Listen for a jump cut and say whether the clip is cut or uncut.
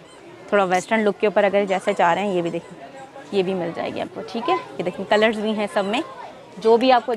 uncut